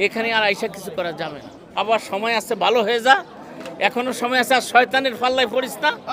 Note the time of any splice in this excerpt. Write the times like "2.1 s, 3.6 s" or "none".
1.8 s